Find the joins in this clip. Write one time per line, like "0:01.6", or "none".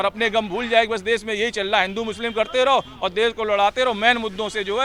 none